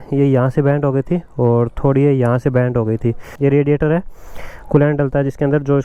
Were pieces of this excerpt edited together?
yes; 1 cut; at 3.3 s

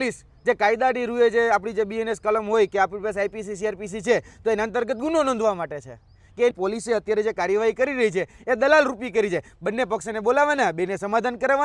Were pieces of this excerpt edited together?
yes; 1 cut; at 6.6 s

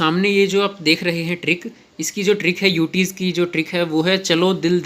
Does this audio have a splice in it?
no; 0 cuts

